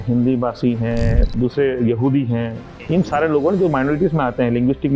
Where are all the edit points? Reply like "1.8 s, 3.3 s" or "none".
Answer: 1.4 s, 2.7 s